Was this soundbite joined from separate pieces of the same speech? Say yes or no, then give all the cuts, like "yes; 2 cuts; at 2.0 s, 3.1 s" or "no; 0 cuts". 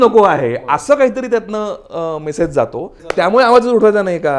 yes; 1 cut; at 3.1 s